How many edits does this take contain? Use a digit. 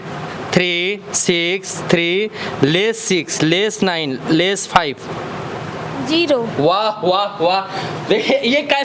0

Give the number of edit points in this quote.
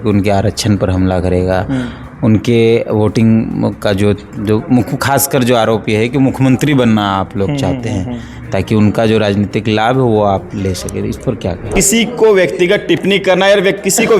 1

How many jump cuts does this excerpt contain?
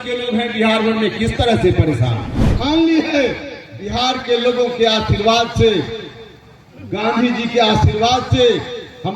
1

